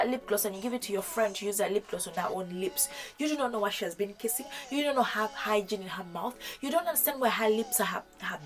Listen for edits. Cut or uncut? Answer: uncut